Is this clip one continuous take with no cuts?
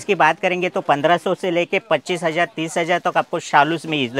yes; 0 cuts

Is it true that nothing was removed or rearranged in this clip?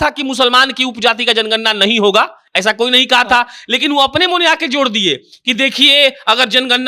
yes; 0 cuts

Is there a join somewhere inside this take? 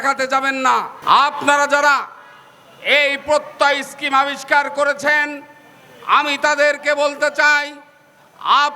yes; 1 cut; at 0.9 s

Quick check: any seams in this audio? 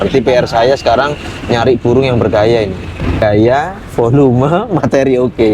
yes; 1 cut; at 3.2 s

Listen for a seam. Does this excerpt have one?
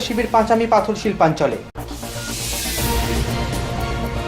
no; 0 cuts

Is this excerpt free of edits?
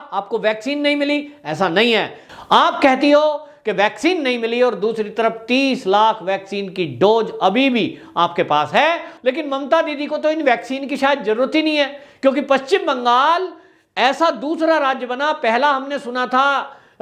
no; 2 cuts; at 2.2 s, 9.1 s

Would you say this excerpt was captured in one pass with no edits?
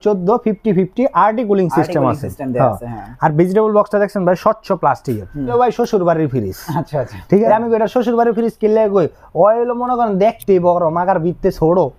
no; 2 cuts; at 5.5 s, 7.5 s

